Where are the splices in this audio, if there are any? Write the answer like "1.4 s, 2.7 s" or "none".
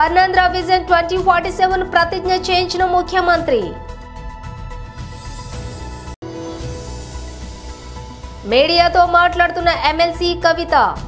3.7 s, 8.2 s